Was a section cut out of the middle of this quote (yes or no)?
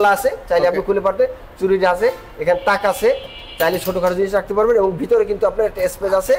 no